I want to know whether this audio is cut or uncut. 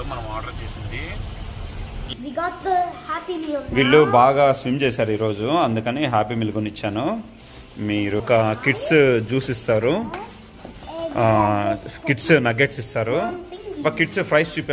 cut